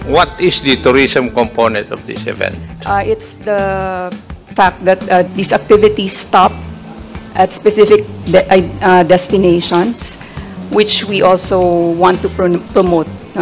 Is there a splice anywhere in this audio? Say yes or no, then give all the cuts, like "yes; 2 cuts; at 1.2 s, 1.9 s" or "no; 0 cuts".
yes; 2 cuts; at 4.4 s, 5.3 s